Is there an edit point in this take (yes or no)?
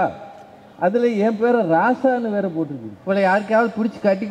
yes